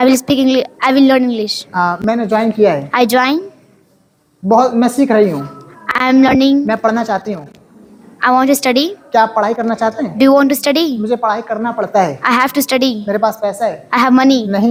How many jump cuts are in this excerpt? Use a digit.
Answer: 0